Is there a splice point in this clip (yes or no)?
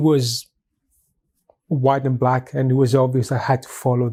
no